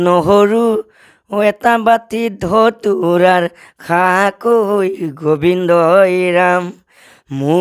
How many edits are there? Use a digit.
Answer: 0